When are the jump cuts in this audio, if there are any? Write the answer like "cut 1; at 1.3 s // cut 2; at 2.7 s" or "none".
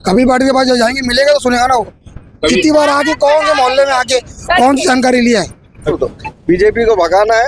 cut 1; at 6.0 s